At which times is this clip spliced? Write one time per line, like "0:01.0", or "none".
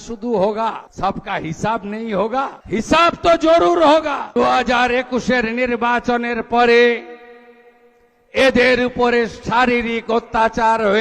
0:00.9
0:02.6
0:04.4